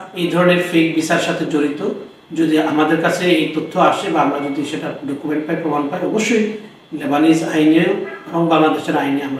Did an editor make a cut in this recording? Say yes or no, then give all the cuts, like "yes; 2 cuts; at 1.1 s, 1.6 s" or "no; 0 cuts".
no; 0 cuts